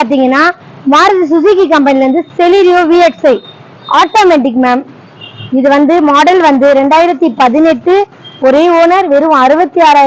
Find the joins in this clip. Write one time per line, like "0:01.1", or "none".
none